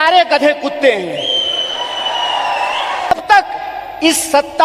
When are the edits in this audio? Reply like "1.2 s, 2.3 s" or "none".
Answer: 3.1 s